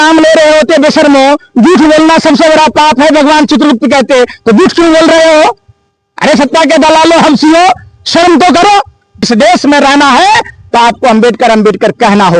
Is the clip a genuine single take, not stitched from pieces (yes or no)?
no